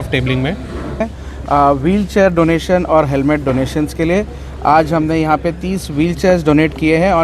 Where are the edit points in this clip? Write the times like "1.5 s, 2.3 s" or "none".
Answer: 1.0 s